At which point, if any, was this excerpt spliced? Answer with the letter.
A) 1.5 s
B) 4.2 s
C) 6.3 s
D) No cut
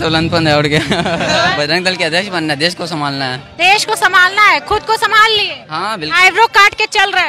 A